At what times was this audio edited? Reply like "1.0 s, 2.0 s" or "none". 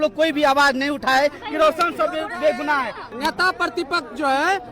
3.1 s